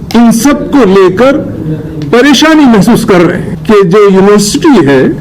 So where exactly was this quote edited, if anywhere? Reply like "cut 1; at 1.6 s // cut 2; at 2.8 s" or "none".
cut 1; at 3.5 s